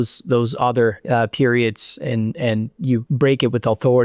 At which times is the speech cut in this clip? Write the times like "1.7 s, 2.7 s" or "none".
3.1 s